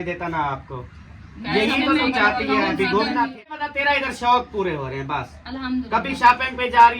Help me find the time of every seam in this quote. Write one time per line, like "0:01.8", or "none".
0:03.6